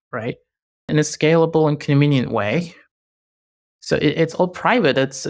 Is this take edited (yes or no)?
no